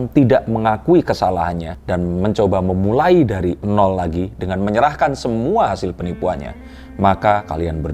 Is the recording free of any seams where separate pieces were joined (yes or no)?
no